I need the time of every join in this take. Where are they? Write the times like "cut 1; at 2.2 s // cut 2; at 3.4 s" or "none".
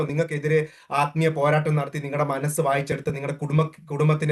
none